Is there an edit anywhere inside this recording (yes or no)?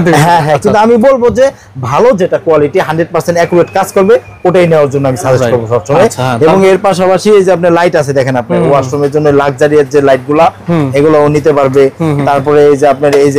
no